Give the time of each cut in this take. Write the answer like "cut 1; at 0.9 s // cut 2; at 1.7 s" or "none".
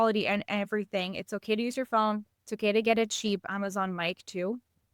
cut 1; at 3.5 s